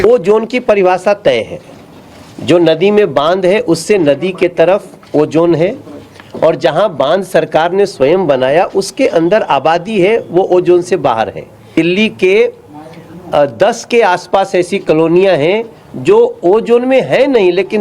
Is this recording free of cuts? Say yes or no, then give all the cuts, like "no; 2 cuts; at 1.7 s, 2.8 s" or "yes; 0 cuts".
no; 1 cut; at 11.7 s